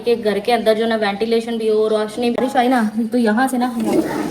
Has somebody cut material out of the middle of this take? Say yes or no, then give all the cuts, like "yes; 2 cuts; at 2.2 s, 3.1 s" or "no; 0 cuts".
yes; 1 cut; at 2.3 s